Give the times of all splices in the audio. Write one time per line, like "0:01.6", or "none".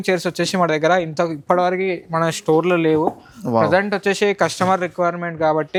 none